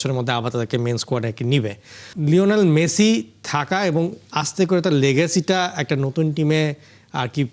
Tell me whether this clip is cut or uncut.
cut